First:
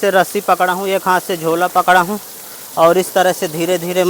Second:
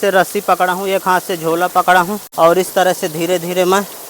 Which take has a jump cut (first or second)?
second